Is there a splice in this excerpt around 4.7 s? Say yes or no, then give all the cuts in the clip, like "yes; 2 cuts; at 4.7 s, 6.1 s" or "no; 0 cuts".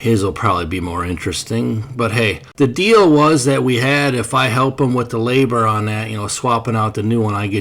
no; 1 cut; at 2.5 s